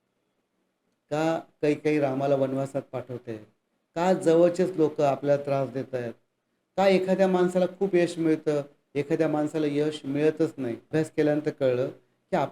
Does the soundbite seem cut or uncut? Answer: cut